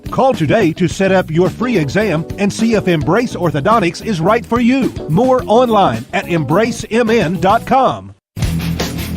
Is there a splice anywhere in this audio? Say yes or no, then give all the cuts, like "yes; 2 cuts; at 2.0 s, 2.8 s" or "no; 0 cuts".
yes; 1 cut; at 8.1 s